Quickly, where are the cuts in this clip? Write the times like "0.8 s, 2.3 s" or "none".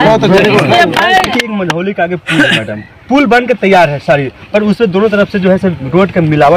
1.3 s